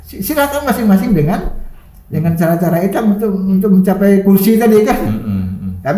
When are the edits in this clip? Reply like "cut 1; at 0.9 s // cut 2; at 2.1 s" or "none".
none